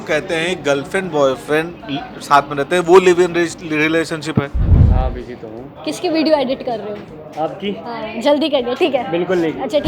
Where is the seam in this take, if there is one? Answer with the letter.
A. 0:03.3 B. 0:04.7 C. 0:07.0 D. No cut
B